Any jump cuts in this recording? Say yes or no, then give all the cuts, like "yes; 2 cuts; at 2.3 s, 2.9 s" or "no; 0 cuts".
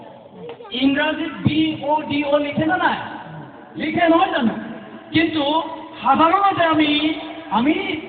no; 0 cuts